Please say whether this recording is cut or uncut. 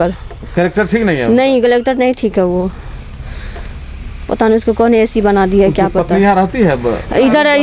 uncut